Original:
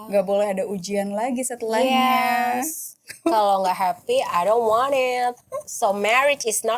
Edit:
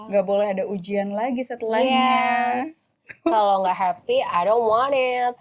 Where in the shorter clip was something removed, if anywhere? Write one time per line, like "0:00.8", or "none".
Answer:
none